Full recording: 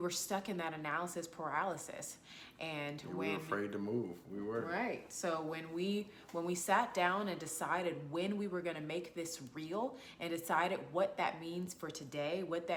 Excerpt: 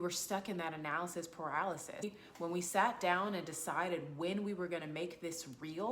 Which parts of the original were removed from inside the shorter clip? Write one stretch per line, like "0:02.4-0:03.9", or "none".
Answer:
0:02.0-0:06.0